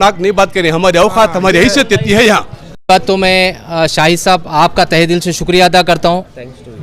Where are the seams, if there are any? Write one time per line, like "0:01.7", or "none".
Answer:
0:02.8

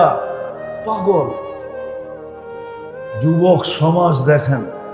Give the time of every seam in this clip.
none

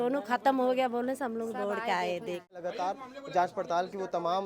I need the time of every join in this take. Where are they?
0:02.6

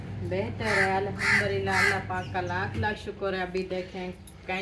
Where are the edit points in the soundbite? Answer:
none

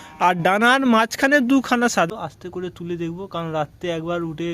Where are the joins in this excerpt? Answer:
0:02.1

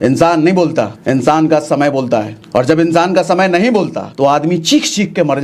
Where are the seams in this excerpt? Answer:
0:01.0
0:02.4
0:04.0

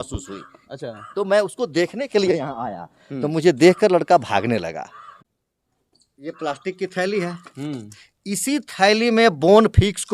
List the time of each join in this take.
0:05.1

